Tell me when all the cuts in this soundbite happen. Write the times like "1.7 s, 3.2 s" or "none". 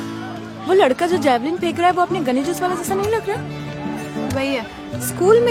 none